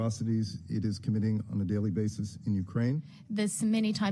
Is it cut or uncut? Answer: cut